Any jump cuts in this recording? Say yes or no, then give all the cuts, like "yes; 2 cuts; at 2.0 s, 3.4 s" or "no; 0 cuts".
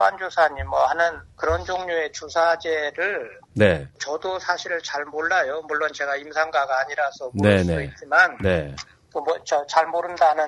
no; 0 cuts